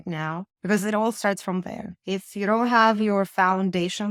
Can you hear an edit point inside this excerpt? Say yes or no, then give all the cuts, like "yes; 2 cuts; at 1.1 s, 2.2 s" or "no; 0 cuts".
no; 0 cuts